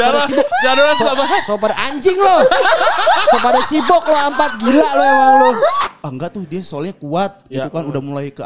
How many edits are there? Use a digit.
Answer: 1